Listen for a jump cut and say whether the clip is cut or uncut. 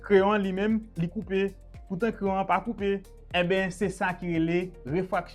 cut